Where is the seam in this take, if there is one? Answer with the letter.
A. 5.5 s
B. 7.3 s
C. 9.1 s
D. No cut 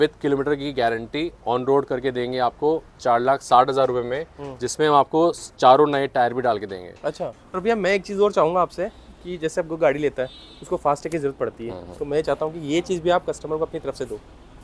B